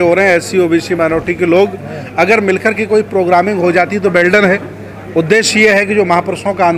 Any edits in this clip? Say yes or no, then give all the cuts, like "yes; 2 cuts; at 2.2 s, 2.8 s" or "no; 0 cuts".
no; 0 cuts